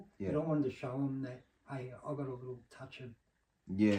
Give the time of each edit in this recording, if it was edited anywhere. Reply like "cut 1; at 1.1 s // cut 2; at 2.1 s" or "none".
none

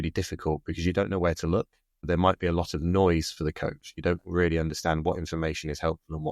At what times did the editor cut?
cut 1; at 2.1 s

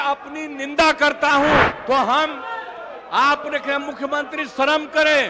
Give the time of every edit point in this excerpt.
cut 1; at 1.7 s

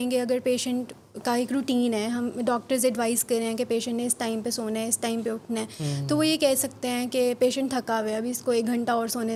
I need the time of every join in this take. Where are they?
none

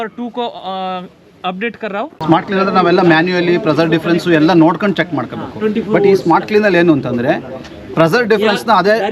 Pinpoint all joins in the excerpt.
cut 1; at 2.2 s

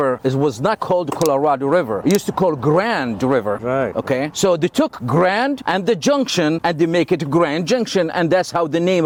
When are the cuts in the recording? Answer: none

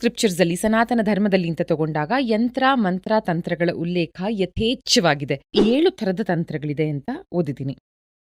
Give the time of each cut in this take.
cut 1; at 5.5 s

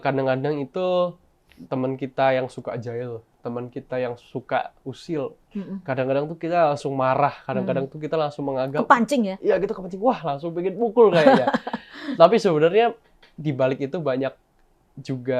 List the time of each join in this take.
none

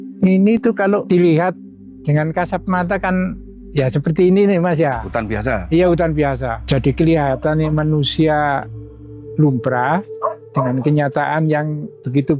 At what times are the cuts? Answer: cut 1; at 1.0 s // cut 2; at 6.5 s

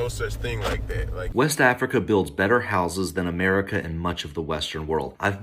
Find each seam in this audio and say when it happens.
cut 1; at 1.3 s

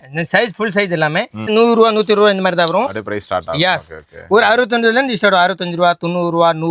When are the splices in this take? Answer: cut 1; at 1.5 s

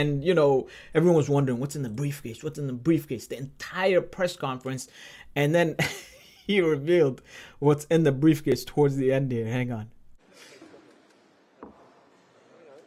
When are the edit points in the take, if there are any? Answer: none

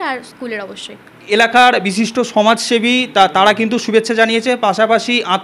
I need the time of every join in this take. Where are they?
cut 1; at 1.3 s

